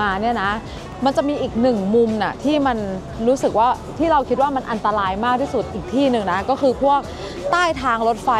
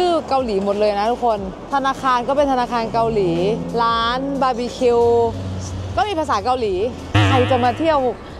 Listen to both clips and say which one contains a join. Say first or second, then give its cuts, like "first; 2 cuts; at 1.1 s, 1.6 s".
second; 3 cuts; at 1.5 s, 3.6 s, 7.1 s